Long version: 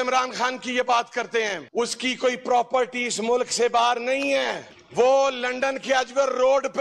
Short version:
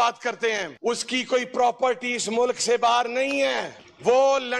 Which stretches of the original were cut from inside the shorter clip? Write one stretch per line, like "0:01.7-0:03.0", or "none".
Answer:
none